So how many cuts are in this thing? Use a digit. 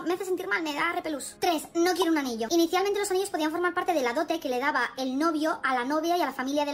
1